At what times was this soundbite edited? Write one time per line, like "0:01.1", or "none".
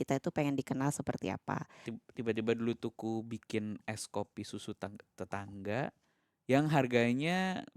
0:01.9